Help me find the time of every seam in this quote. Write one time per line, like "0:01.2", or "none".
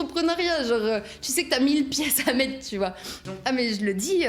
0:03.2